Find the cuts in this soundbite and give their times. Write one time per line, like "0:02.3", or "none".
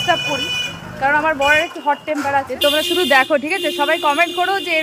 0:02.5